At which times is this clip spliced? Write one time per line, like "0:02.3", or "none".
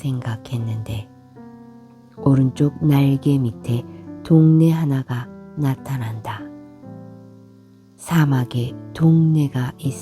0:00.9
0:02.2